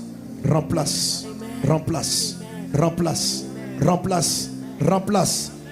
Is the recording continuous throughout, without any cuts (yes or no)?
yes